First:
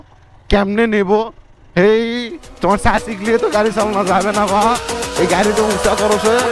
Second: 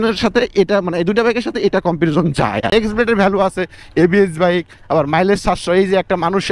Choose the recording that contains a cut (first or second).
second